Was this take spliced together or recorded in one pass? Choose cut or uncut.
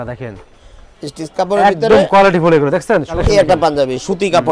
cut